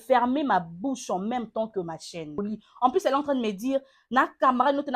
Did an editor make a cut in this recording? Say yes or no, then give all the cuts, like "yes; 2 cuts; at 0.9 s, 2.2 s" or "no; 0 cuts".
yes; 1 cut; at 2.4 s